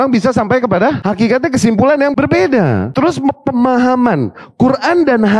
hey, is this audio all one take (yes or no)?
no